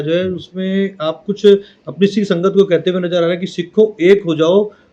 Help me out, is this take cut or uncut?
uncut